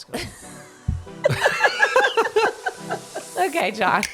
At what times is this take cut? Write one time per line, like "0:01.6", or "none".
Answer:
0:03.2